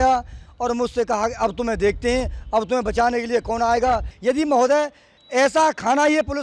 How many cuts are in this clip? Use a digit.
1